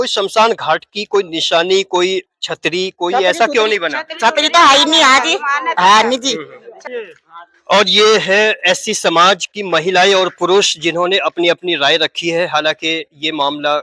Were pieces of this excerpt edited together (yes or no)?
no